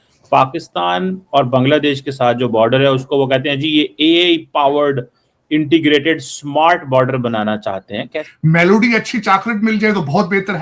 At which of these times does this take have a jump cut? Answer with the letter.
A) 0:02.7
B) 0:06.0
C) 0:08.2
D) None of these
C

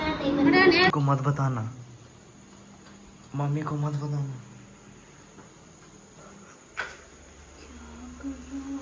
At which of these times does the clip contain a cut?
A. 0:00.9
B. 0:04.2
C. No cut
A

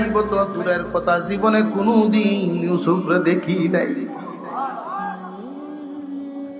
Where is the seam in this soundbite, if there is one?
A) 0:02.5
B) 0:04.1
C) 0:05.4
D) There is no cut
C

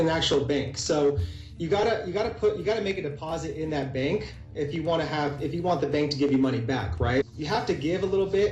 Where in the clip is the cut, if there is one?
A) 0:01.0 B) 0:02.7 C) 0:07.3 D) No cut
C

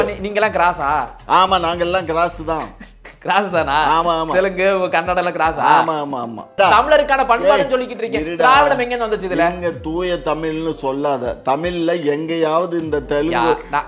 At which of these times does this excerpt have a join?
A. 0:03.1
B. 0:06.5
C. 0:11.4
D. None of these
B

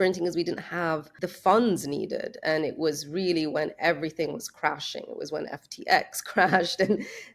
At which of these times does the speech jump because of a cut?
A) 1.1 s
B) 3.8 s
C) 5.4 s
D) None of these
A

